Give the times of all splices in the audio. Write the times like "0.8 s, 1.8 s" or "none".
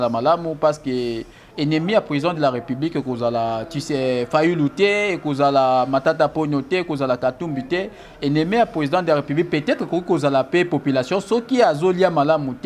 none